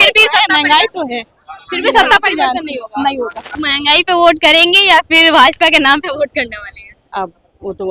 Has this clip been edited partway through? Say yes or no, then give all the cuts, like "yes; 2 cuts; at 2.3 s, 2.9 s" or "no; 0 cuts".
yes; 1 cut; at 3.4 s